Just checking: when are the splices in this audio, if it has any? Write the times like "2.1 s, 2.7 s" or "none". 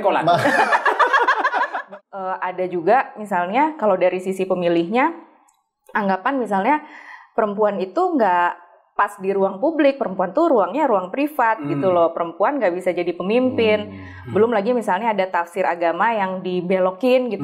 1.8 s